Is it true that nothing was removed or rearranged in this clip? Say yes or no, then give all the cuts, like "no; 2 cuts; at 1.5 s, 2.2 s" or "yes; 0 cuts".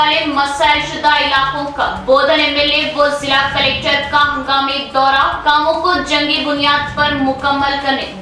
yes; 0 cuts